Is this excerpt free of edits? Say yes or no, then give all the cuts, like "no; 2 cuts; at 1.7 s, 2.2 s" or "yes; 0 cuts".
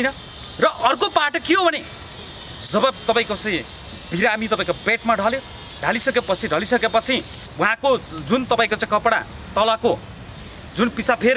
yes; 0 cuts